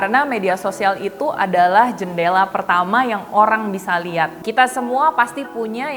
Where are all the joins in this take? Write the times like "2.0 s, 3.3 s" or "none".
4.4 s